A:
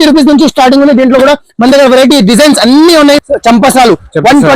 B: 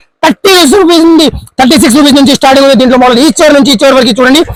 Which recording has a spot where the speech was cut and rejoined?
A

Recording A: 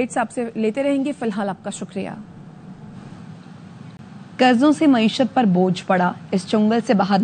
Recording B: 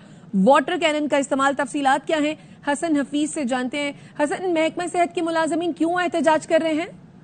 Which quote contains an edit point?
A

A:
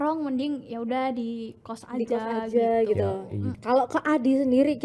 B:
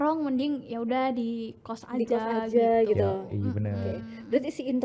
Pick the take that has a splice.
A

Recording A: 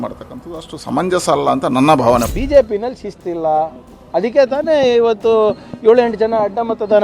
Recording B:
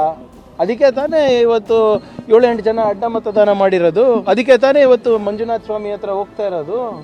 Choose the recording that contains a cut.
A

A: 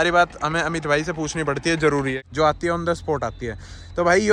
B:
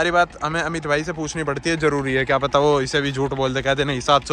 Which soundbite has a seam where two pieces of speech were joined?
A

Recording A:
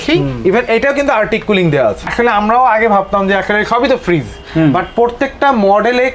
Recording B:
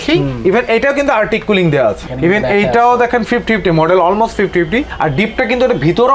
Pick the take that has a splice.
A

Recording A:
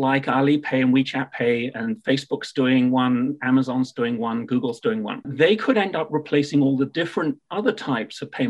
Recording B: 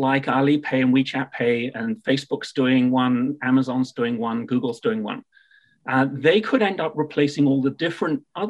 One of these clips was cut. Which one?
A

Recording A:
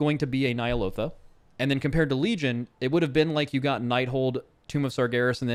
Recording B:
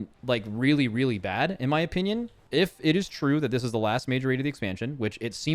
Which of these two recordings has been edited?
B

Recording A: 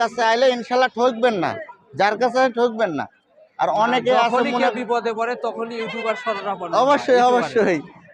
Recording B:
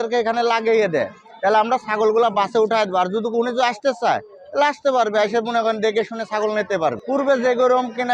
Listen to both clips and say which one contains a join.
B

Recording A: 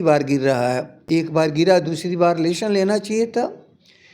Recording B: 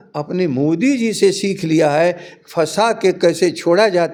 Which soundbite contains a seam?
A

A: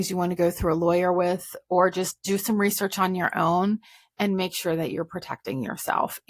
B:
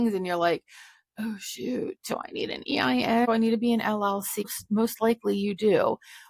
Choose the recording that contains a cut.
B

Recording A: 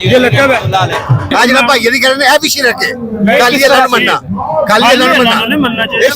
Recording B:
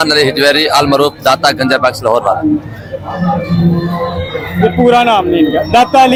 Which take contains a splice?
A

